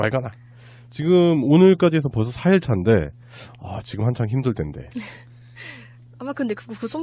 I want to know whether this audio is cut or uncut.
cut